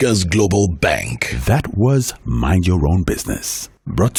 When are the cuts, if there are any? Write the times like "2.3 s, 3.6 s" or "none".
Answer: none